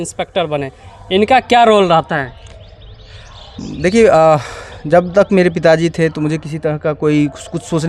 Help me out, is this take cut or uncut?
uncut